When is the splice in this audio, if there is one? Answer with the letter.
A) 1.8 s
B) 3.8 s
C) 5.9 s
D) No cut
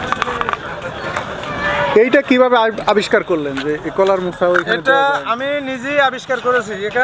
D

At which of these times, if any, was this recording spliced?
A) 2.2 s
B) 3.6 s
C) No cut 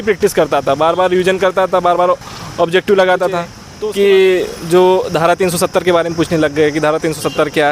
B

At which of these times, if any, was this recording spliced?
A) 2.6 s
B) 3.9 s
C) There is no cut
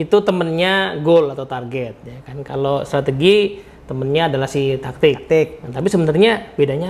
C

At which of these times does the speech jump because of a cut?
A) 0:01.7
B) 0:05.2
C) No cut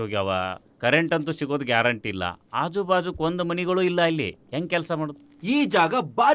B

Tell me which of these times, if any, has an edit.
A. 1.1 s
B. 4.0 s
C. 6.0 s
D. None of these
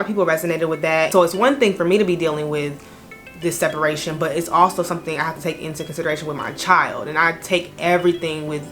A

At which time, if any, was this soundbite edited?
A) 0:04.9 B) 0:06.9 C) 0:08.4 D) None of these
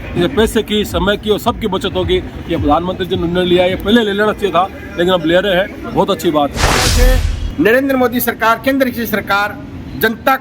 B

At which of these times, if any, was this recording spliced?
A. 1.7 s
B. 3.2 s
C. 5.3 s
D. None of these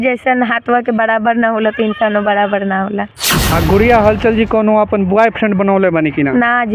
B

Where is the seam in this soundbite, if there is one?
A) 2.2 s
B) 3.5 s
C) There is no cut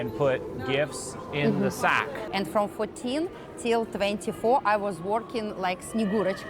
A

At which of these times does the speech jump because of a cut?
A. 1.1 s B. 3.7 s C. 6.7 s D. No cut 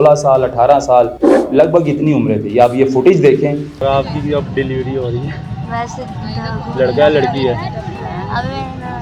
A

